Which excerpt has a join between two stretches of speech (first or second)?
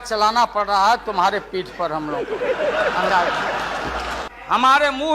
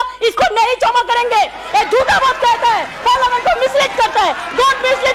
first